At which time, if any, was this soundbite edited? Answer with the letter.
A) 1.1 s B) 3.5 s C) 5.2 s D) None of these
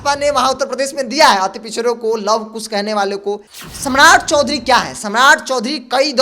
B